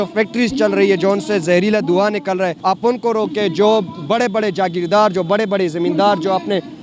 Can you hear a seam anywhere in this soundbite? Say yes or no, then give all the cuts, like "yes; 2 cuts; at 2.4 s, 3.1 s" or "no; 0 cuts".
yes; 1 cut; at 2.6 s